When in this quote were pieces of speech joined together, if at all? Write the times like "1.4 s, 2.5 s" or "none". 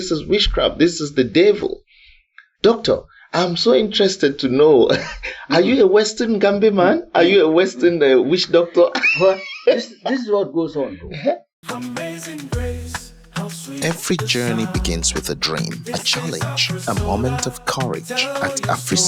11.5 s